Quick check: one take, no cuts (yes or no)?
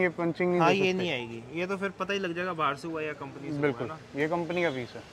yes